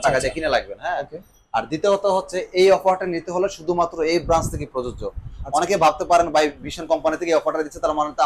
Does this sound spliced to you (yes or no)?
no